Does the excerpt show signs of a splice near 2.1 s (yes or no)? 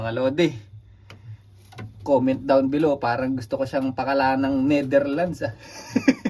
no